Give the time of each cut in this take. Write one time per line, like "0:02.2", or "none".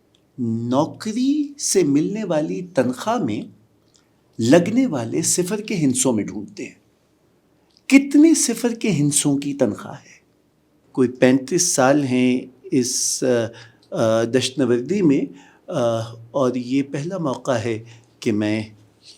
0:10.8